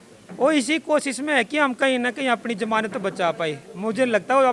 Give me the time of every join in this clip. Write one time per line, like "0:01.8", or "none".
none